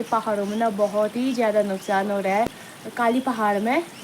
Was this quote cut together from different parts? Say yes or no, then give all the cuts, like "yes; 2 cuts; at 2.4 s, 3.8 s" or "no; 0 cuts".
yes; 1 cut; at 2.6 s